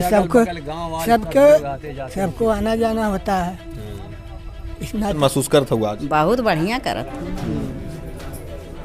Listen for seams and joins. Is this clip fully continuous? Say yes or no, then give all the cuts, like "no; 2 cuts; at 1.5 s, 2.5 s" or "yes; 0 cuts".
no; 1 cut; at 5.2 s